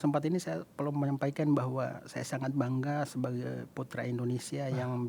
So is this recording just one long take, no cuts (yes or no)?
yes